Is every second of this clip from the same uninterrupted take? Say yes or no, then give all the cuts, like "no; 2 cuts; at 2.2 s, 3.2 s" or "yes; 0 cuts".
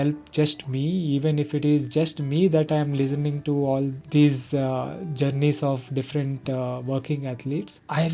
yes; 0 cuts